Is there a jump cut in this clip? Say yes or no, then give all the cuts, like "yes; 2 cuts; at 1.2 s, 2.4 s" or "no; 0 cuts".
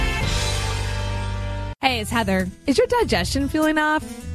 yes; 1 cut; at 1.7 s